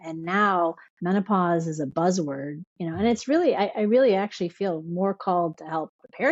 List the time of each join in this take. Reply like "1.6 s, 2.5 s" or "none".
none